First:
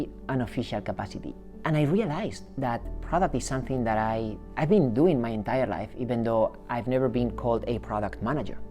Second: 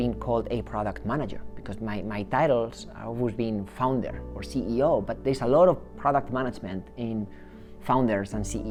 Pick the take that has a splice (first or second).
first